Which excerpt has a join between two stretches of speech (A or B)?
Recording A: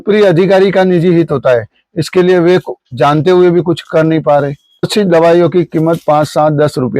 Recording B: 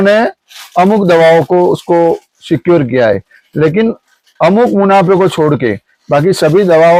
A